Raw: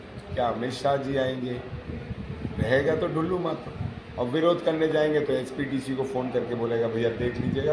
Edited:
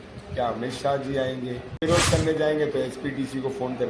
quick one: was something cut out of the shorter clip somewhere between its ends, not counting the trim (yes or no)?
yes